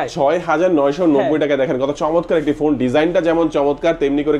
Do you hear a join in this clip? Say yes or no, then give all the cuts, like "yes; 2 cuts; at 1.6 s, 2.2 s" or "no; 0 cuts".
no; 0 cuts